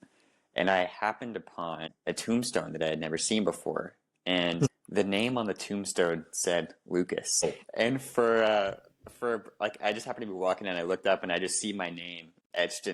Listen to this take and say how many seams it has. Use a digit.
3